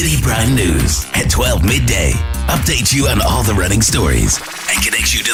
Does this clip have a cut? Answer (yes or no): no